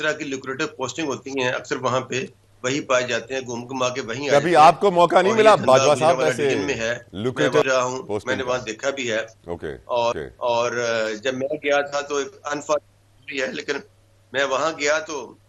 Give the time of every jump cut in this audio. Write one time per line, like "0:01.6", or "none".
none